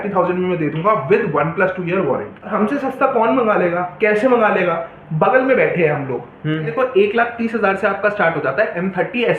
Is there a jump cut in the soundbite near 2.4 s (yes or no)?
yes